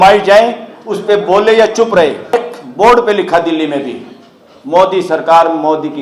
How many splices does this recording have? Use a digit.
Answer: 1